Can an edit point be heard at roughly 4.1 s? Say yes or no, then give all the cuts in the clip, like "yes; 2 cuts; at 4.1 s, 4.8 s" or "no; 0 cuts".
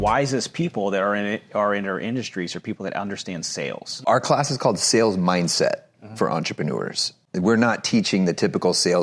yes; 2 cuts; at 4.1 s, 7.2 s